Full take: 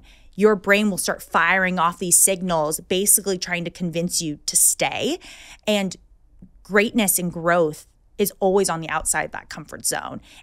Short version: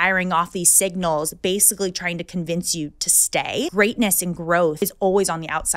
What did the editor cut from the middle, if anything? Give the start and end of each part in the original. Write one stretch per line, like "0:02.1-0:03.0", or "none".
0:05.2-0:06.7
0:07.7-0:08.2

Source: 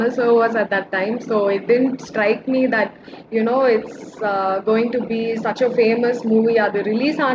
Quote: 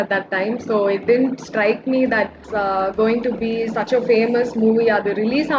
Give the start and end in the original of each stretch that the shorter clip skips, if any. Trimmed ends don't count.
0:03.0-0:04.1

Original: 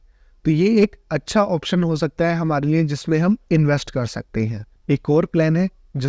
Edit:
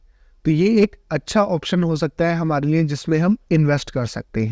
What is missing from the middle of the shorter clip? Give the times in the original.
none

